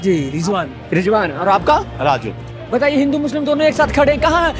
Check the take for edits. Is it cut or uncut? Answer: uncut